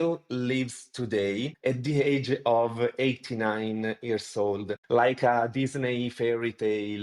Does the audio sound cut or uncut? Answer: cut